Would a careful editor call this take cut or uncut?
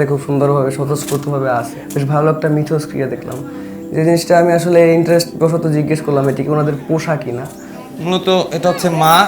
cut